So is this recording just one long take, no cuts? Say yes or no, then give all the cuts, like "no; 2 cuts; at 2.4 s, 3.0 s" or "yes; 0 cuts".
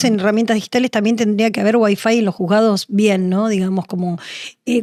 yes; 0 cuts